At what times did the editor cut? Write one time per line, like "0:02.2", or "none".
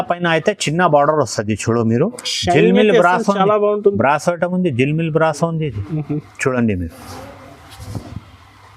none